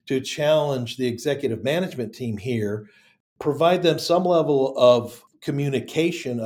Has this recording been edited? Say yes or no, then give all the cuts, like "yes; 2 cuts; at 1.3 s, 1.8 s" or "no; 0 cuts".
yes; 1 cut; at 5.2 s